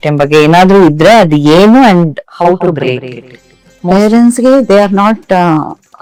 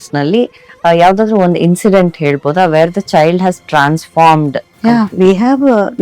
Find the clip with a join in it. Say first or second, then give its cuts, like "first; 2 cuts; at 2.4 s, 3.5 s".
second; 1 cut; at 4.7 s